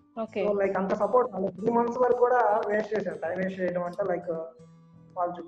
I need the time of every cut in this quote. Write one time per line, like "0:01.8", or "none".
none